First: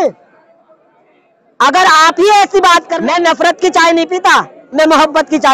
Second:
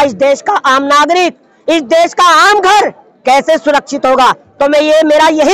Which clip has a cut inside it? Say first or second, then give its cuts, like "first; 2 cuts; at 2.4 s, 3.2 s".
first; 1 cut; at 2.9 s